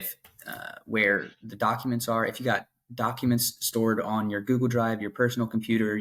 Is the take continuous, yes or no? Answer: yes